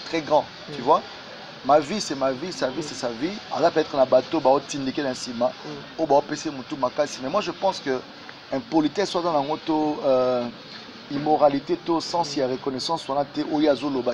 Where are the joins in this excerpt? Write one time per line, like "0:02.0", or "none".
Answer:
none